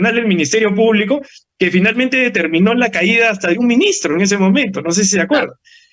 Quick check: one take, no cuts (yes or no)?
yes